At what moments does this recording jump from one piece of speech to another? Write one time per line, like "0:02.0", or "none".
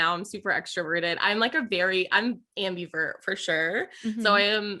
none